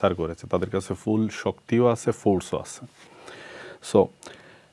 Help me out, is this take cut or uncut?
uncut